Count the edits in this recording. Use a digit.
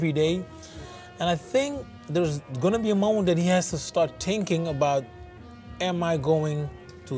0